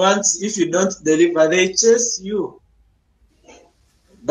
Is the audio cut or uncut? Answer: uncut